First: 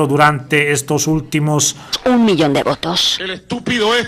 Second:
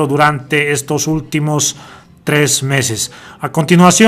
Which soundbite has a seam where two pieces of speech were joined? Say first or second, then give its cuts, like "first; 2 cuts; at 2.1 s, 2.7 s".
second; 1 cut; at 2.0 s